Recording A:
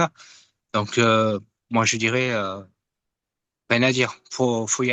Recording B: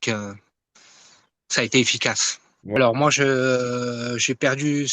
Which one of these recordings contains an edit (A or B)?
B